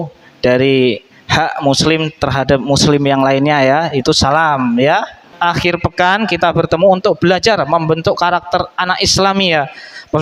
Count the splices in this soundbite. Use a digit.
1